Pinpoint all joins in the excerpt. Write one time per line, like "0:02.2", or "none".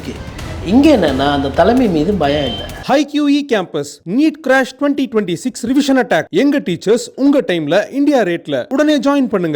0:02.7